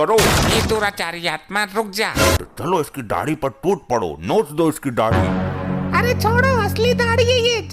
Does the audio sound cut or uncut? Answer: cut